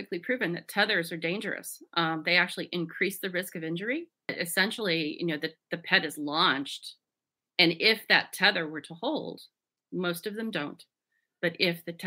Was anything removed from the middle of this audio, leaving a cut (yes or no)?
yes